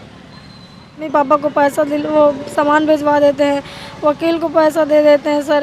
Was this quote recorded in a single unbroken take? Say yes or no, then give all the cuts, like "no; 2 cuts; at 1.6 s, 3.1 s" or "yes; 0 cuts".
no; 1 cut; at 1.1 s